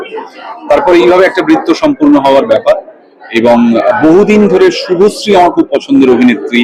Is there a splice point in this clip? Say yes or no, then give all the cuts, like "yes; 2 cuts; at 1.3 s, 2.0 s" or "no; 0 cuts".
no; 0 cuts